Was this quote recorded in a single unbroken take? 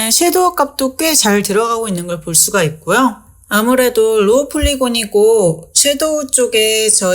no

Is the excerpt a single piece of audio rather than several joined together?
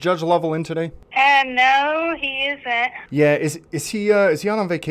no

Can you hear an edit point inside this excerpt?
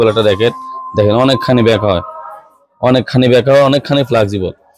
no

